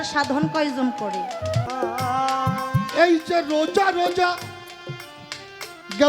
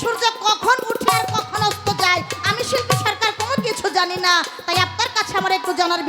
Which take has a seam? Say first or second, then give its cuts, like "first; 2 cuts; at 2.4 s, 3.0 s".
first; 1 cut; at 1.7 s